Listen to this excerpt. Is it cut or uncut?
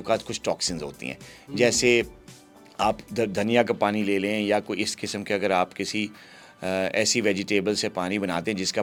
uncut